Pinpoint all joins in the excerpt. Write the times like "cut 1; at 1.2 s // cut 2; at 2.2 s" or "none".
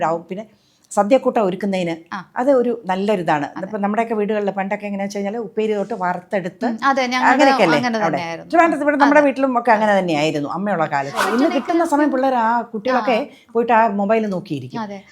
cut 1; at 11.2 s